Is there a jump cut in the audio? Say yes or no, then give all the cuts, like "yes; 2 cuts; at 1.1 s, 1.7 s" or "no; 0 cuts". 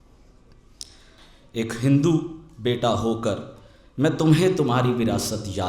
yes; 1 cut; at 1.3 s